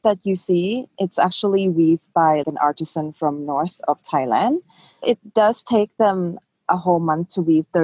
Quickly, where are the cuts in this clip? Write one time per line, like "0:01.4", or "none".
0:00.9